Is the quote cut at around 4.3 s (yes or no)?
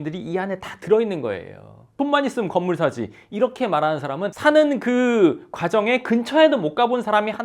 yes